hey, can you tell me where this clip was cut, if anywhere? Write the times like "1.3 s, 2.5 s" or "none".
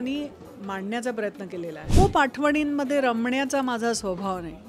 1.8 s